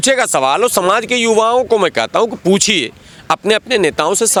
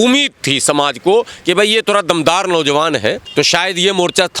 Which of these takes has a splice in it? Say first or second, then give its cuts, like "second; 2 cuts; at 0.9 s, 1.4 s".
second; 1 cut; at 3.2 s